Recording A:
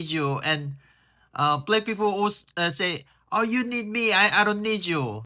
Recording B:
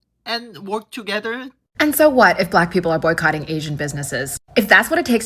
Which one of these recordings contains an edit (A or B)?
B